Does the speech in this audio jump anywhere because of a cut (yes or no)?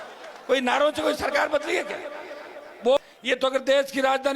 yes